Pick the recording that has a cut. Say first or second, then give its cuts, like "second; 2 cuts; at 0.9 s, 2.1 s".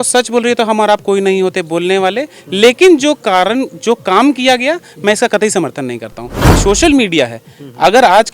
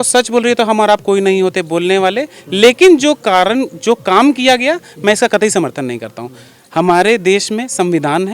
first; 1 cut; at 6.6 s